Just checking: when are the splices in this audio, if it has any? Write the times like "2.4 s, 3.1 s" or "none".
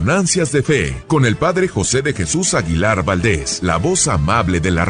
0.9 s, 3.5 s